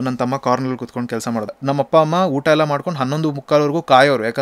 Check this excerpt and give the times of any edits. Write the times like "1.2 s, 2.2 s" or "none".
1.6 s